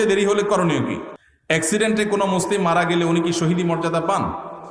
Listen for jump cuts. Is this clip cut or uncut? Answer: cut